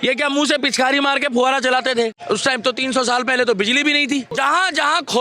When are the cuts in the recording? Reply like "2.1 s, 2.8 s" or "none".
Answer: 2.2 s, 4.3 s